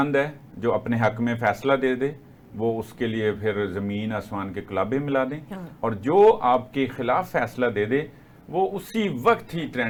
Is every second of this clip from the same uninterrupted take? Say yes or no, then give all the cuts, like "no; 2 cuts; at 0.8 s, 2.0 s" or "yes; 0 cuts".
yes; 0 cuts